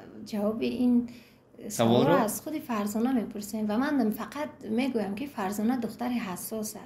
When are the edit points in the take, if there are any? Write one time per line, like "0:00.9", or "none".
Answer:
none